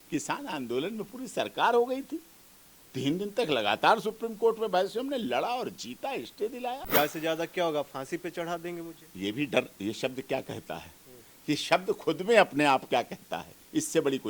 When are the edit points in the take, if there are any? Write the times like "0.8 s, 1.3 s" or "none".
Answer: 6.8 s

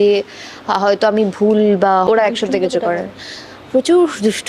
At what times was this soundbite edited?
2.1 s

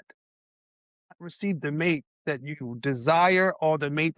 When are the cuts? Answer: none

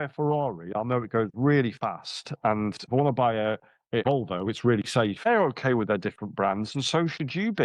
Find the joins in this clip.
2.8 s, 4.0 s, 5.3 s

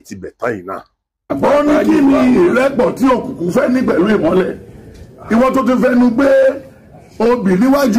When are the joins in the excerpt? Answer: 1.4 s

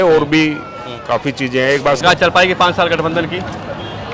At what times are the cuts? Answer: 2.0 s

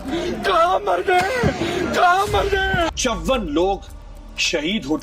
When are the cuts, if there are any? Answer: 2.9 s

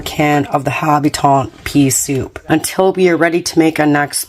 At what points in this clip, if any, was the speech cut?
2.3 s

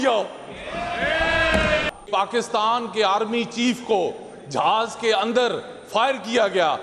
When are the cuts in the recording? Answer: 2.0 s

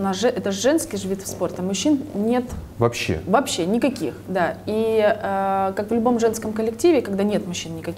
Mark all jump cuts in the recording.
none

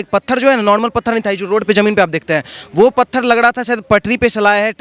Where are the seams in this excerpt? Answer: none

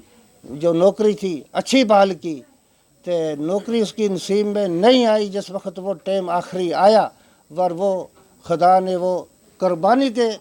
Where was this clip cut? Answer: none

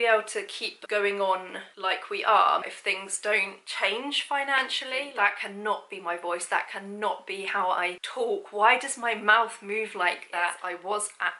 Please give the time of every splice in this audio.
2.6 s, 5.1 s, 10.6 s

